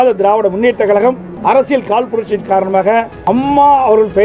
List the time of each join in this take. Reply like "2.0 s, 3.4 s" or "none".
1.3 s, 3.1 s